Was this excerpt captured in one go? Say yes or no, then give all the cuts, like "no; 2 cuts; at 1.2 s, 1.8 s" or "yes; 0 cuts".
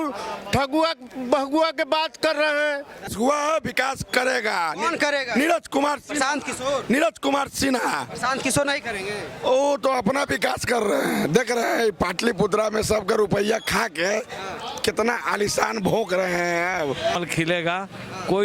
no; 2 cuts; at 3.1 s, 17.2 s